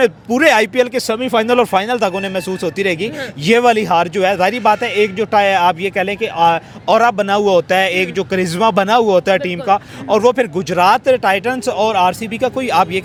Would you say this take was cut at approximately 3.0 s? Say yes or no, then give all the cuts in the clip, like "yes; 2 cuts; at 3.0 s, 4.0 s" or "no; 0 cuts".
no; 0 cuts